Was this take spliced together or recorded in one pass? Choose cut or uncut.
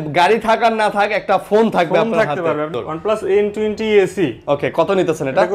cut